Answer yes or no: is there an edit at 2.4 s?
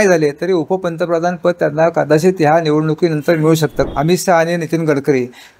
no